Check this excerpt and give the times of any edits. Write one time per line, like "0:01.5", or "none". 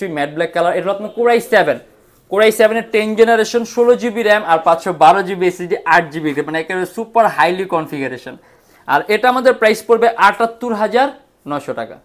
none